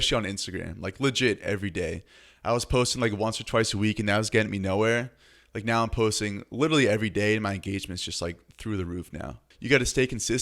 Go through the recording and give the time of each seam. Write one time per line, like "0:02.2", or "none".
0:09.5